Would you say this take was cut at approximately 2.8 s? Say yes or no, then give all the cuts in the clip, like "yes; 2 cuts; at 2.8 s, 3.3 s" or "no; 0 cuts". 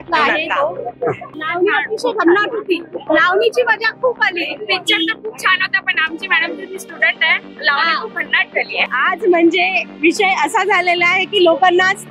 no; 2 cuts; at 1.3 s, 8.9 s